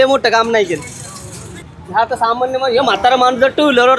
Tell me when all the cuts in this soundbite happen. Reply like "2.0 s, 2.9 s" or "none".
1.7 s